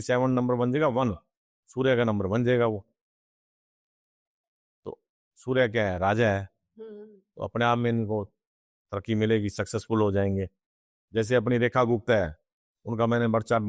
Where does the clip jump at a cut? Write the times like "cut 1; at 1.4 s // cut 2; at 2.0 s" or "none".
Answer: none